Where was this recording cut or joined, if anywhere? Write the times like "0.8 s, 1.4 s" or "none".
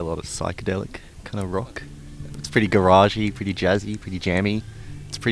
none